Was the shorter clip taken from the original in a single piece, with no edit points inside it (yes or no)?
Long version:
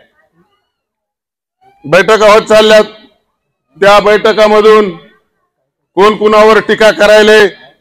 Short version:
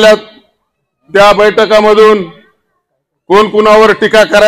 yes